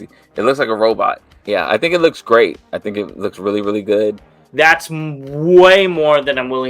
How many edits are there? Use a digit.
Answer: 2